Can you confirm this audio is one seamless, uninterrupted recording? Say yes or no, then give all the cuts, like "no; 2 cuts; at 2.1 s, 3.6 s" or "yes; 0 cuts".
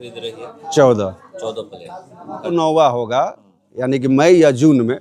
no; 1 cut; at 2.5 s